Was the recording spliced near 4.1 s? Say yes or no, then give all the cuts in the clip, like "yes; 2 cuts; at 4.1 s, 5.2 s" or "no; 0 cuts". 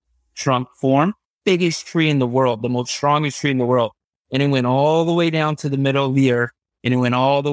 no; 1 cut; at 1.3 s